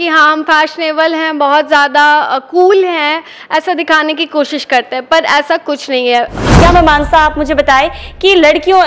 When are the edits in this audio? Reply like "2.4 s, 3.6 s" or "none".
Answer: 6.5 s